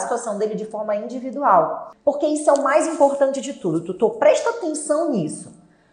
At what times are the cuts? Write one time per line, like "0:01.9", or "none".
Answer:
0:01.9

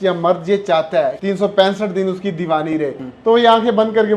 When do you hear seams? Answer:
0:01.2
0:03.1

